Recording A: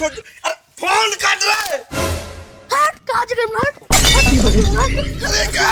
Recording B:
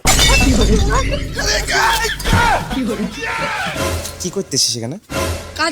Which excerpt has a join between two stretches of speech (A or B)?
B